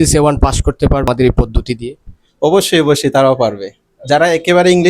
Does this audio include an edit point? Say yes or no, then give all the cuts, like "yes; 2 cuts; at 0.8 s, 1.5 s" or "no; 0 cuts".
yes; 1 cut; at 1.1 s